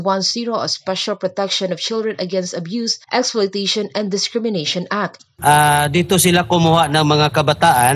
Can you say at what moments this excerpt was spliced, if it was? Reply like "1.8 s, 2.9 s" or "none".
5.1 s